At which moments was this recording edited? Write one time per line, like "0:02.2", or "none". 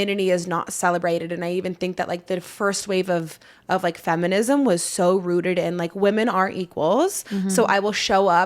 none